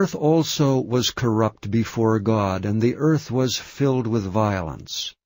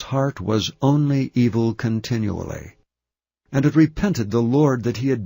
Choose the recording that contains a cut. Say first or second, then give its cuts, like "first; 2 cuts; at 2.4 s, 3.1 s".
second; 1 cut; at 4.3 s